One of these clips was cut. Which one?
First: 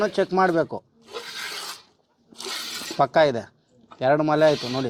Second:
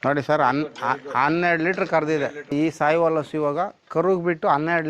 second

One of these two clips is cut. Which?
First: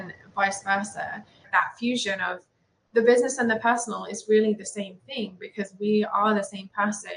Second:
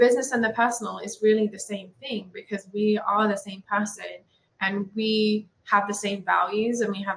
first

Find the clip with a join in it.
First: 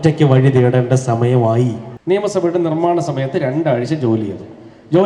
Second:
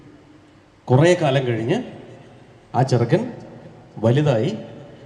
first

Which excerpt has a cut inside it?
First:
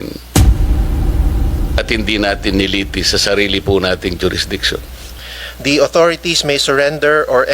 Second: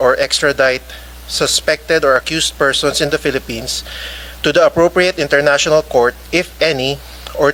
first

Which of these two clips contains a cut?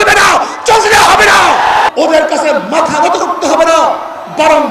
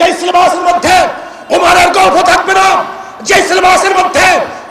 first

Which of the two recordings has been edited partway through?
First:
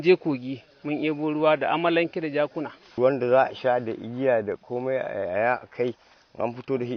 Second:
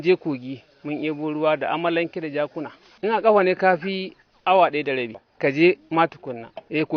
first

